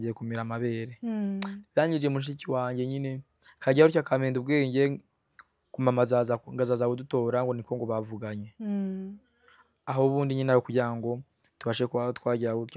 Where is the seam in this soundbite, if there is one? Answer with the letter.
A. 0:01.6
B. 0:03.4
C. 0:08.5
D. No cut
D